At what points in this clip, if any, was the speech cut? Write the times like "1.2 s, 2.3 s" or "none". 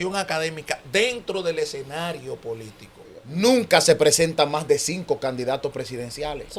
3.1 s